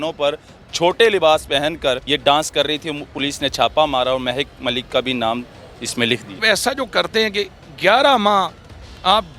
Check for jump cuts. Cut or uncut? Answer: cut